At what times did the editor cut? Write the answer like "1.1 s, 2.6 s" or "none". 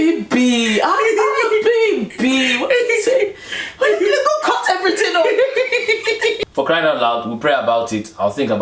6.4 s